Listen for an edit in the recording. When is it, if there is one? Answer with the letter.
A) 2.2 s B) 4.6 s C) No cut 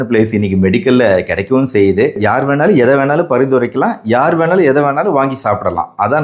A